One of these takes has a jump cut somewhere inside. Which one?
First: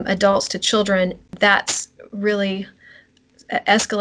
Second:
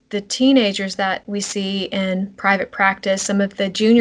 first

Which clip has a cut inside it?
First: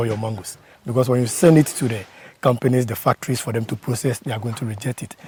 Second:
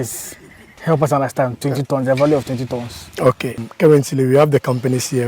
second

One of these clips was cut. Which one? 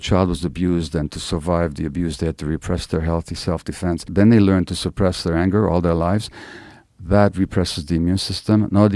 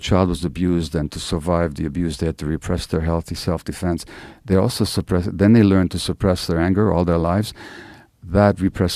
first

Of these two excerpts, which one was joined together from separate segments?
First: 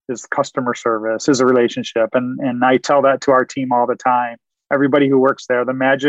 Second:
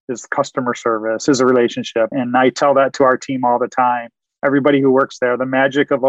second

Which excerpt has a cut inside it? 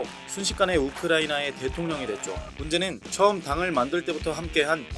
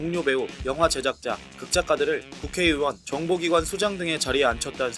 first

